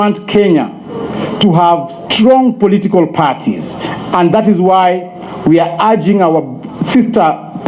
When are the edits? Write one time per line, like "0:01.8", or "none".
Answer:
none